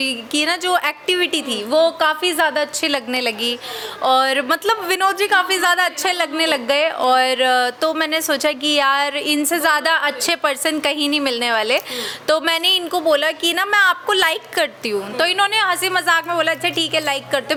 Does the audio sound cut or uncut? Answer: uncut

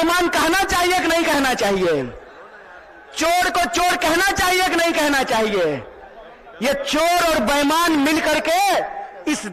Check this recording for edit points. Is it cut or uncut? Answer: uncut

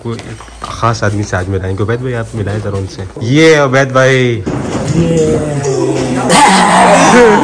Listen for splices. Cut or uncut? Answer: cut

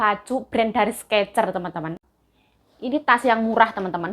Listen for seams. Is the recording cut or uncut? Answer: cut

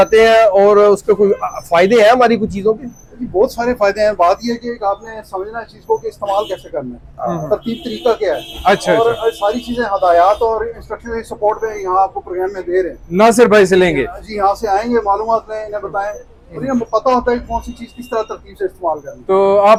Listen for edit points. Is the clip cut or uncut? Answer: uncut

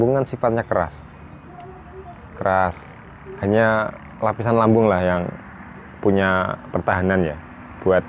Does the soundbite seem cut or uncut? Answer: uncut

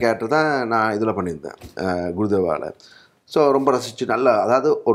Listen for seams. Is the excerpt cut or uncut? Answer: uncut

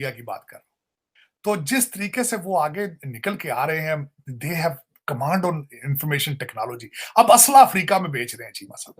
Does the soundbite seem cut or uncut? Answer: uncut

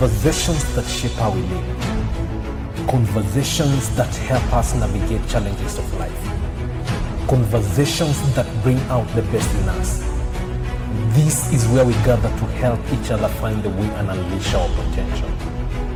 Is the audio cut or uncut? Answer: uncut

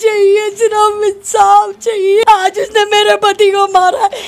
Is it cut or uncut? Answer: cut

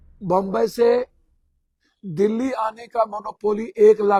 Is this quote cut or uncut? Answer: uncut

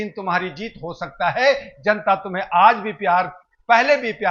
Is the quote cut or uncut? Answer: uncut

